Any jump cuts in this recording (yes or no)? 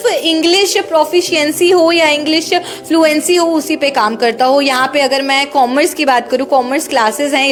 no